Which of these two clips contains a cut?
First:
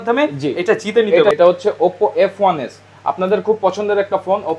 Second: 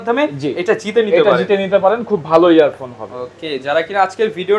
first; 1 cut; at 1.3 s

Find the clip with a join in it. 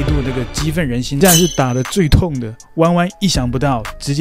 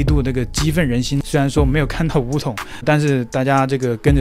first; 1 cut; at 1.2 s

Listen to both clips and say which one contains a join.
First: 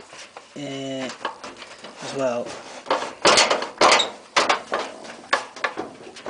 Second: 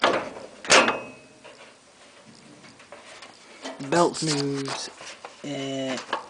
second; 1 cut; at 2.8 s

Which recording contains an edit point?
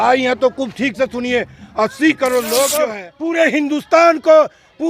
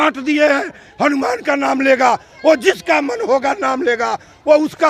first; 1 cut; at 3.0 s

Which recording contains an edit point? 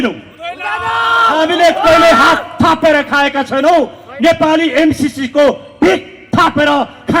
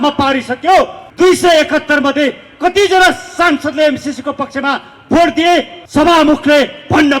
second; 2 cuts; at 1.0 s, 5.8 s

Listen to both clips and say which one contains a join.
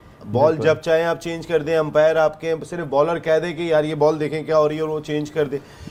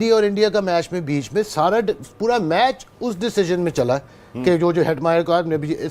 second; 1 cut; at 4.3 s

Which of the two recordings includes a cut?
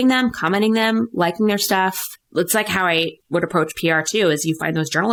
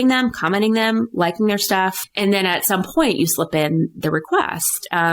second; 1 cut; at 2.0 s

